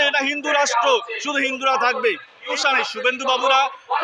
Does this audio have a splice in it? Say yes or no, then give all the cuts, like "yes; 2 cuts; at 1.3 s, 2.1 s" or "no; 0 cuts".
yes; 1 cut; at 2.5 s